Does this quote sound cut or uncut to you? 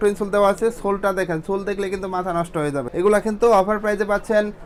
uncut